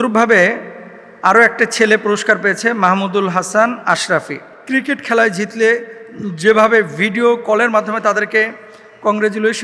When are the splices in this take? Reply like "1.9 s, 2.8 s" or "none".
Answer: 4.5 s